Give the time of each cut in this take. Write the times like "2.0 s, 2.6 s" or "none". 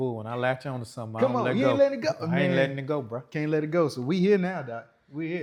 none